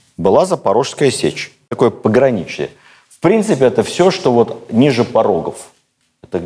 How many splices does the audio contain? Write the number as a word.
one